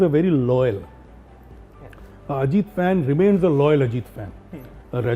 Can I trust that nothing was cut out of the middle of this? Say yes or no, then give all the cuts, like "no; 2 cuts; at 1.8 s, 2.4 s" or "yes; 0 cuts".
yes; 0 cuts